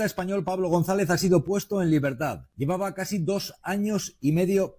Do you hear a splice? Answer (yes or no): yes